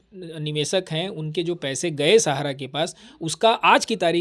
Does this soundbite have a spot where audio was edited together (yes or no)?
no